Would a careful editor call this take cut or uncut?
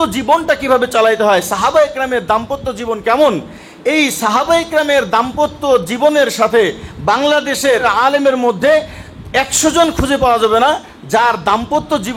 cut